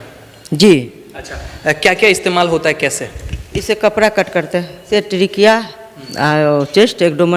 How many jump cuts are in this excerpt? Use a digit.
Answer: 1